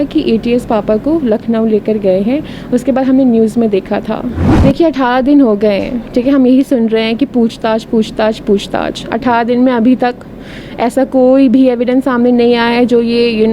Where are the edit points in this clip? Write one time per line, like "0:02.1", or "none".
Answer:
0:04.5